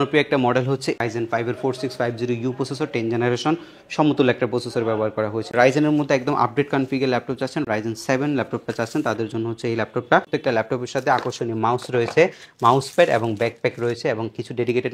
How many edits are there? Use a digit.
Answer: 3